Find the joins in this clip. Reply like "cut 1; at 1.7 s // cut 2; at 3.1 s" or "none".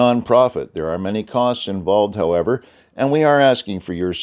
none